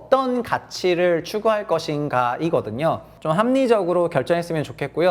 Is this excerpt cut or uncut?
cut